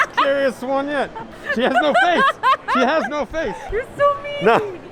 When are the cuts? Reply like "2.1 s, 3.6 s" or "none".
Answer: 1.2 s, 3.6 s